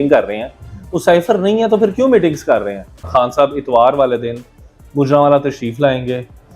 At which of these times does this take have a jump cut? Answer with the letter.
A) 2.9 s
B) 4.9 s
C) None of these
A